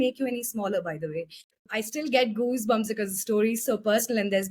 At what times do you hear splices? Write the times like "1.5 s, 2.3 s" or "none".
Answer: 1.6 s